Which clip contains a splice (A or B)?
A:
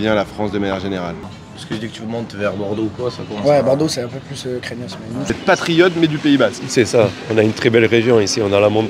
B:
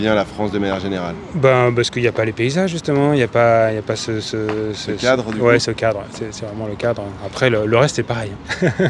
A